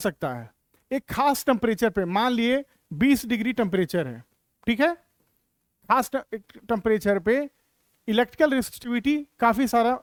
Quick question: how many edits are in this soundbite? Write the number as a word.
zero